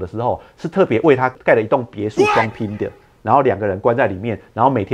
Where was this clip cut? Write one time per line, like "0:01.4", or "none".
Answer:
0:01.3